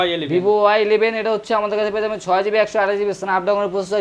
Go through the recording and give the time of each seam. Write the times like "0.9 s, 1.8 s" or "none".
none